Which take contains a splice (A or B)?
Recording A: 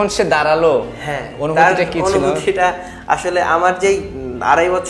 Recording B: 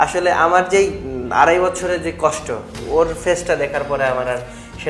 B